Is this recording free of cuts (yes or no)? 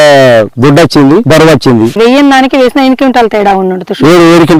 yes